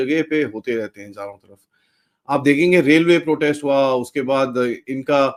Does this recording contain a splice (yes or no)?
no